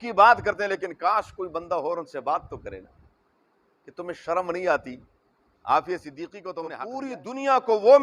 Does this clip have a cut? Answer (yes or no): yes